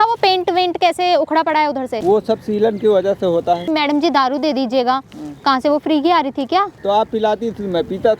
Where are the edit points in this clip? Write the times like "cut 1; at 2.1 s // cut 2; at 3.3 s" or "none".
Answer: cut 1; at 1.9 s // cut 2; at 3.6 s // cut 3; at 6.7 s